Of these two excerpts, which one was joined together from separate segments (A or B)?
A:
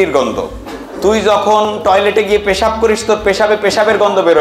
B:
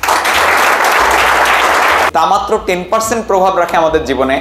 B